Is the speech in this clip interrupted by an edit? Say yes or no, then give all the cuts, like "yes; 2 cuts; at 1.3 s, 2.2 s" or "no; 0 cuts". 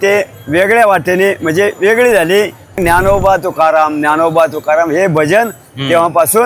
yes; 1 cut; at 2.8 s